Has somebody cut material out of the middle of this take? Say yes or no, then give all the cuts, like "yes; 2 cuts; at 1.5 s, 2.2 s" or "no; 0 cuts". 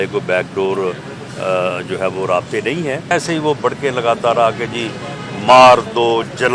yes; 1 cut; at 3.1 s